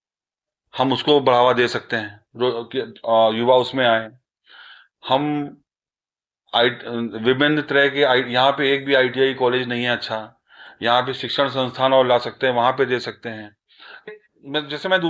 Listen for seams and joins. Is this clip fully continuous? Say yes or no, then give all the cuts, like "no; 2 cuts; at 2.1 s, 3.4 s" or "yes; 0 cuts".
no; 1 cut; at 14.1 s